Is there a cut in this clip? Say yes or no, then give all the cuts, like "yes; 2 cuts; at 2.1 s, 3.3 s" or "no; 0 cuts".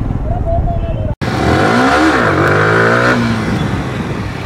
no; 0 cuts